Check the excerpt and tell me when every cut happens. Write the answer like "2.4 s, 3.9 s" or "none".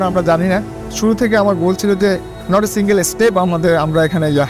0.9 s